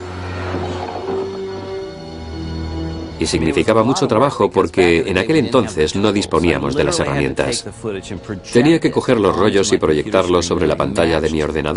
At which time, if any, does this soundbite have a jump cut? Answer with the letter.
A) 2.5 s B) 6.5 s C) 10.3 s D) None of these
C